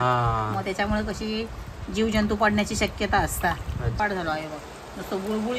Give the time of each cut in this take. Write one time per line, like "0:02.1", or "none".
0:04.0